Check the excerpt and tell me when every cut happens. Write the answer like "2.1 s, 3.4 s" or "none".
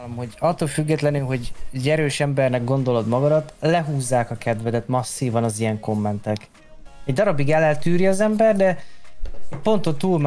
none